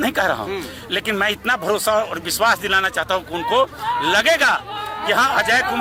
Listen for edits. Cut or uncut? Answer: uncut